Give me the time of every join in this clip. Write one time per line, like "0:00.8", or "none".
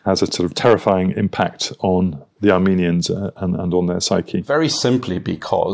0:04.4